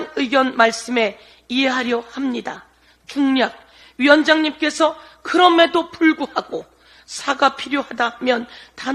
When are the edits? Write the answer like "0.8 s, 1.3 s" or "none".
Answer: none

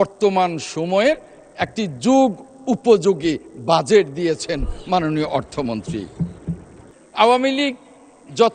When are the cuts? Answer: 7.0 s

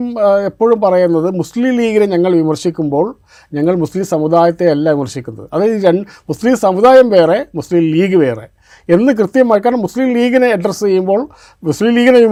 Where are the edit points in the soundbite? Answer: none

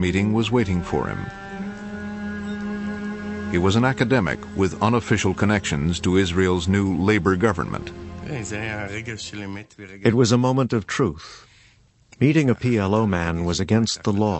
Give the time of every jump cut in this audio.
4.8 s

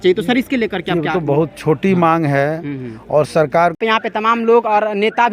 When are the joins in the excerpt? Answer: 3.8 s

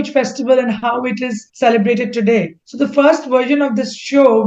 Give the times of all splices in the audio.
1.4 s, 2.6 s

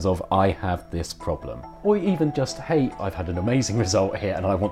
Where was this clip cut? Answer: 1.6 s, 3.0 s

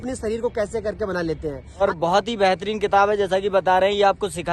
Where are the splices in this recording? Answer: 1.8 s

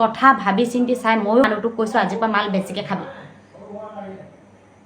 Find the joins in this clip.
1.4 s

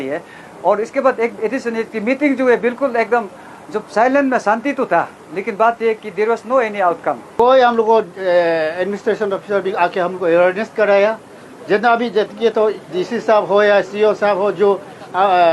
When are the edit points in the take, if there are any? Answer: 7.2 s

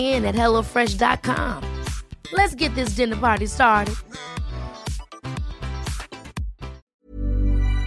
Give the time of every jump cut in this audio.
6.8 s

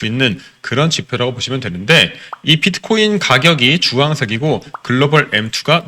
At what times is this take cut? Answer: none

